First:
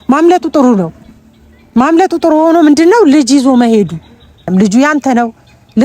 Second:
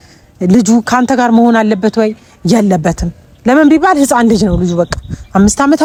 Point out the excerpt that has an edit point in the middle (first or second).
first